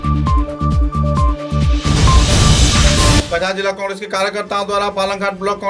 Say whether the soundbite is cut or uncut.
cut